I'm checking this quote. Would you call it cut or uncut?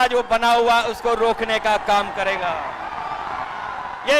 uncut